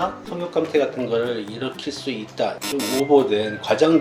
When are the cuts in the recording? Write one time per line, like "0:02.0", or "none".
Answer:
none